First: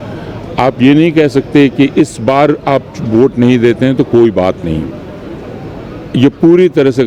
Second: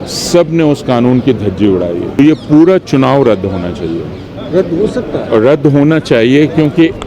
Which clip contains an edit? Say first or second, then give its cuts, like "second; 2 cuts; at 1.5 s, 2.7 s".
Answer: second; 1 cut; at 2.2 s